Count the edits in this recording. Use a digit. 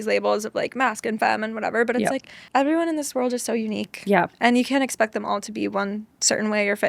1